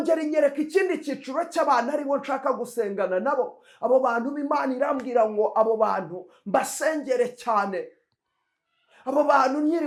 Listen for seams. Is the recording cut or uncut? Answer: uncut